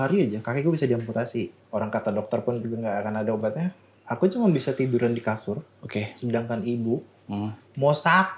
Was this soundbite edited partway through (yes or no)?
yes